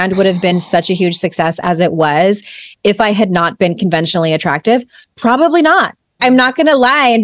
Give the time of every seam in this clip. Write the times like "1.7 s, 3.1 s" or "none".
6.2 s